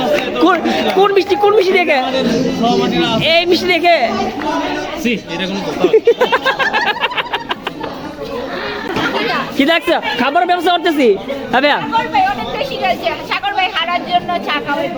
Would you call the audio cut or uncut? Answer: uncut